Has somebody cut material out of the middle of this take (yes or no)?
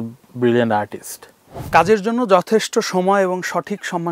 yes